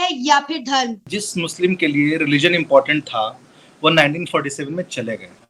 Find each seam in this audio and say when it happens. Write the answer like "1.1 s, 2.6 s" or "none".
1.1 s